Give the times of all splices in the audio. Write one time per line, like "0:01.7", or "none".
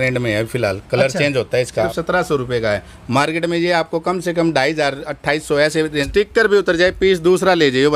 0:01.9
0:06.1